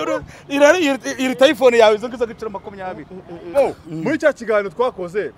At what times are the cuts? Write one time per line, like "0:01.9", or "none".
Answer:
0:03.5